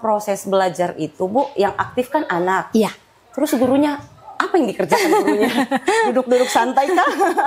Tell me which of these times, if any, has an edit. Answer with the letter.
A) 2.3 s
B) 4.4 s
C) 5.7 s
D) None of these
D